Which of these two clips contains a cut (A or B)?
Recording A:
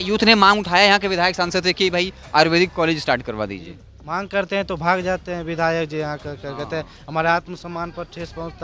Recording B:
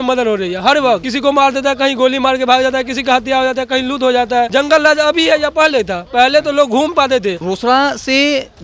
B